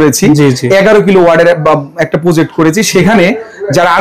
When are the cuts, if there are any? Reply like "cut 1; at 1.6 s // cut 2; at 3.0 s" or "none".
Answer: none